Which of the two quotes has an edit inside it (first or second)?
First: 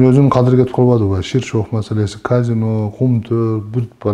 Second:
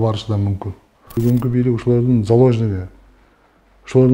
second